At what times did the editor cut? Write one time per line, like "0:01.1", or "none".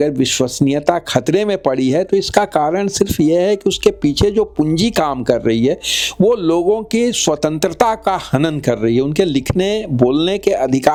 none

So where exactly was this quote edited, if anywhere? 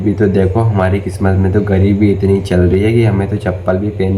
none

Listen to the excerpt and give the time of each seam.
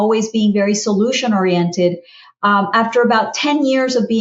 none

